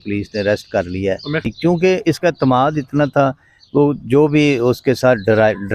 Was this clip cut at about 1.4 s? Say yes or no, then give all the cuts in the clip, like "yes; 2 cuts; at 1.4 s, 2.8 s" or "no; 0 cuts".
yes; 1 cut; at 1.4 s